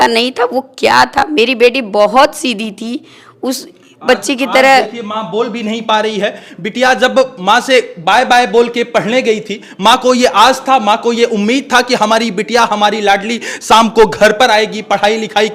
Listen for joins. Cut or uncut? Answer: uncut